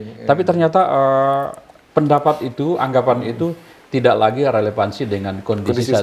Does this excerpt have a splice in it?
no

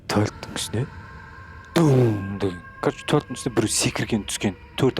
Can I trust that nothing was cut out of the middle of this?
no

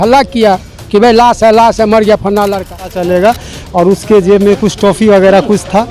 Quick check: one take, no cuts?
no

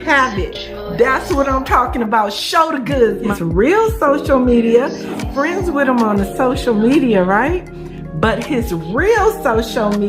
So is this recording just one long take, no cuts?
no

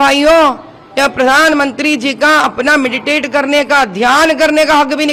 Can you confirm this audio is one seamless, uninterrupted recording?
yes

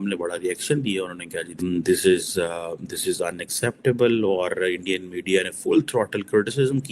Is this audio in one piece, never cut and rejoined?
no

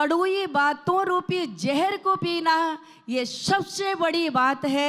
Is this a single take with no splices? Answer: yes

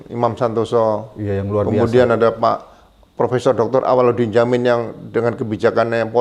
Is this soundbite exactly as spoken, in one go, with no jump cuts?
yes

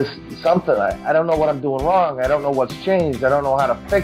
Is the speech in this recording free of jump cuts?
yes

